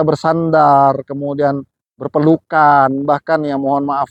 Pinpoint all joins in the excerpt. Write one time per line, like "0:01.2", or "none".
none

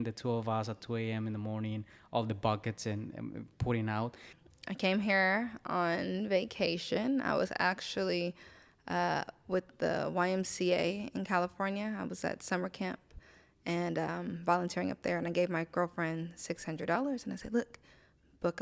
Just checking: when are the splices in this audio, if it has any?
0:04.3

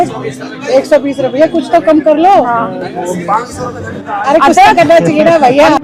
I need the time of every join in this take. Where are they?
none

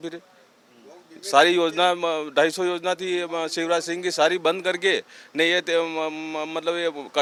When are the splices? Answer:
none

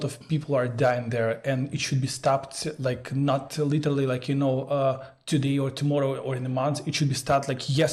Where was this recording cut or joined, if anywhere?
none

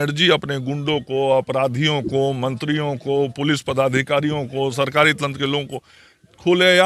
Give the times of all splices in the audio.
none

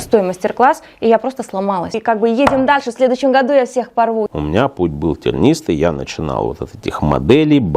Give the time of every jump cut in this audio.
0:01.9
0:04.3

